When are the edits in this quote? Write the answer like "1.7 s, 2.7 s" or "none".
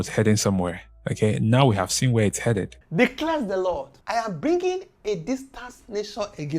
2.8 s